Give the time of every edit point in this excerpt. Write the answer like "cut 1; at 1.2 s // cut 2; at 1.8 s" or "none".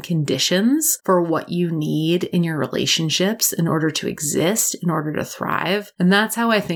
cut 1; at 0.9 s // cut 2; at 5.9 s